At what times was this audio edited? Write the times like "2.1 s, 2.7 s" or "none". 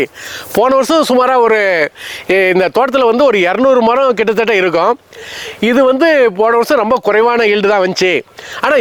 none